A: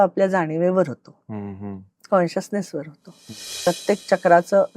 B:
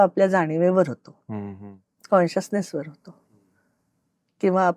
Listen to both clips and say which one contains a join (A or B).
A